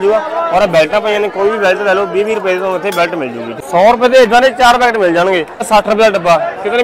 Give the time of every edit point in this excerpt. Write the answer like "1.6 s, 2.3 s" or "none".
3.5 s, 5.7 s